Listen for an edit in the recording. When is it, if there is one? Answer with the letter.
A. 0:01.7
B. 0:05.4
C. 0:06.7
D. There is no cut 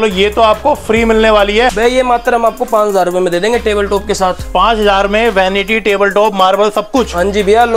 A